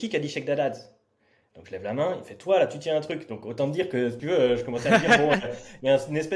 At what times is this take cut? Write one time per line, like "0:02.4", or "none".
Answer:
none